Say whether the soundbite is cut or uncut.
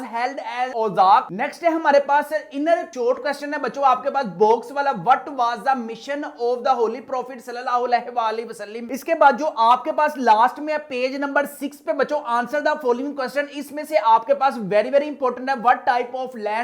uncut